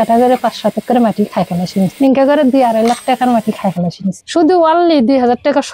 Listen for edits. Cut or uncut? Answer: cut